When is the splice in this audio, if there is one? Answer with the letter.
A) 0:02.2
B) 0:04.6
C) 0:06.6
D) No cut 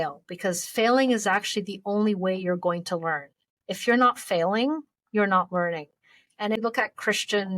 C